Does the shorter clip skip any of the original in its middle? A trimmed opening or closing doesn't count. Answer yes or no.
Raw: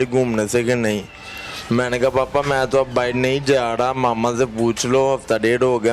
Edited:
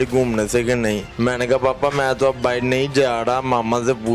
yes